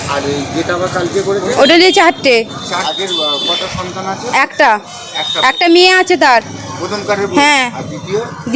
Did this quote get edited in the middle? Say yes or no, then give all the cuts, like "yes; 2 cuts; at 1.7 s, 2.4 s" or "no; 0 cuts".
yes; 1 cut; at 2.9 s